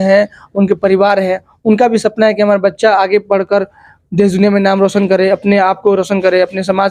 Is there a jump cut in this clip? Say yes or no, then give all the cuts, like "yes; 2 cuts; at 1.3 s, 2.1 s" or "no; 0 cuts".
no; 0 cuts